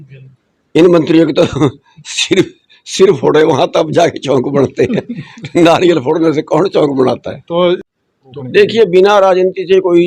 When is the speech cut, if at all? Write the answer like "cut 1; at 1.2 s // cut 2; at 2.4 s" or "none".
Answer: cut 1; at 7.8 s